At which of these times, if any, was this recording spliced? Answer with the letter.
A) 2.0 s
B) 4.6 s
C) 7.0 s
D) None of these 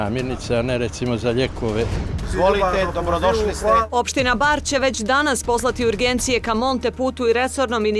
A